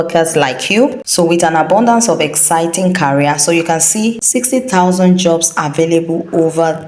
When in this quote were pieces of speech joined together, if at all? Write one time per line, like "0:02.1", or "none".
0:01.0
0:04.2